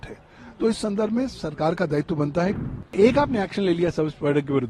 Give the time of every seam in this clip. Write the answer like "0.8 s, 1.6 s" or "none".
2.6 s